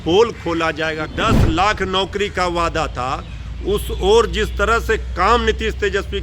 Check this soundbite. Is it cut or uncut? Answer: cut